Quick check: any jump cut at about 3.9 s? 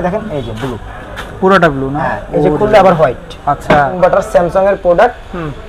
yes; 1 cut; at 3.9 s

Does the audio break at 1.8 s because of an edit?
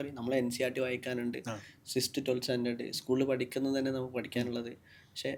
no; 0 cuts

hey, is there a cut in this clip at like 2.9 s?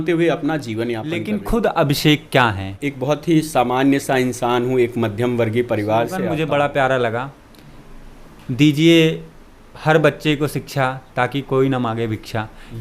yes; 3 cuts; at 1.2 s, 2.9 s, 6.3 s

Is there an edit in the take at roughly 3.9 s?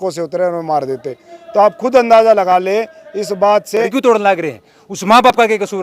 yes; 1 cut; at 3.9 s

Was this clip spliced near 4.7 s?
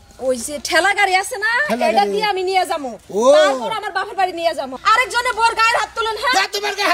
yes; 1 cut; at 4.7 s

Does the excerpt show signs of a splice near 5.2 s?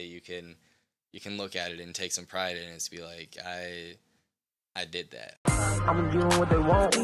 yes; 1 cut; at 5.2 s

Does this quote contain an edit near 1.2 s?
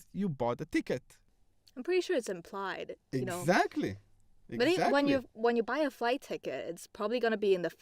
yes; 1 cut; at 1.2 s

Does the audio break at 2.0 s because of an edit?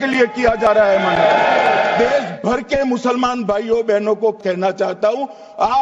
yes; 2 cuts; at 2.0 s, 4.4 s

